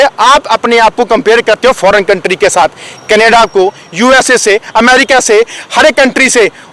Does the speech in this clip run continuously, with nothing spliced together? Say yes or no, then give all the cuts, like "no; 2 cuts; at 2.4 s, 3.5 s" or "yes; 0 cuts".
yes; 0 cuts